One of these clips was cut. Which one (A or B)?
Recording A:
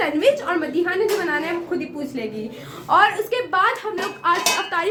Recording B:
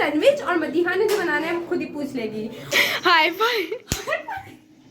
B